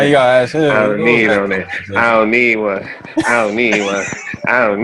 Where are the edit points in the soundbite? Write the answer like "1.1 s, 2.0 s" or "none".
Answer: none